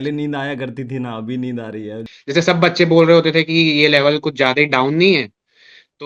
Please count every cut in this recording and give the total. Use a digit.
1